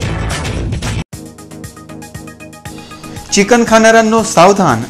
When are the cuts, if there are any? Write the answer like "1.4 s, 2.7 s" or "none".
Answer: 0.9 s